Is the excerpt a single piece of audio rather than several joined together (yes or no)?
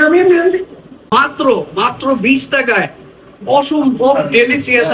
no